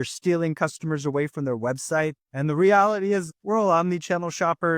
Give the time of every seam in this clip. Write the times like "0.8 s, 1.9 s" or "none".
2.3 s, 3.3 s